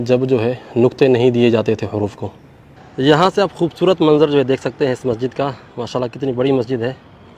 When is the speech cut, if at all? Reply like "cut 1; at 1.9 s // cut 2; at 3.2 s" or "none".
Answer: cut 1; at 2.5 s